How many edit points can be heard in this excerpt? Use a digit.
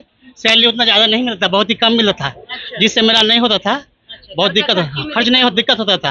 0